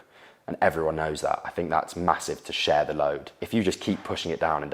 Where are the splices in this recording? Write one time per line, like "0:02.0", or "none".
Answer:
0:03.3